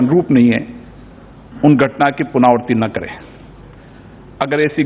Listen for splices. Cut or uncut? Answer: uncut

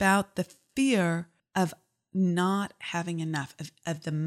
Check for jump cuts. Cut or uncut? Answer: cut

